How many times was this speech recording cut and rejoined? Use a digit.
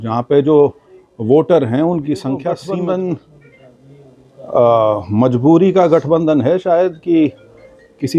1